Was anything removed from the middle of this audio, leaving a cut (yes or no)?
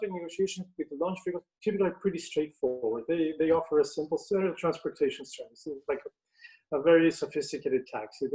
no